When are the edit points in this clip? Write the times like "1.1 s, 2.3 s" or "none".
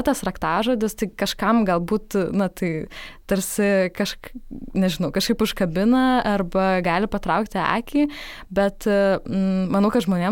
none